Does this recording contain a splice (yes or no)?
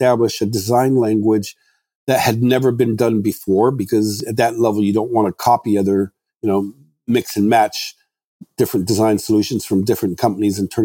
no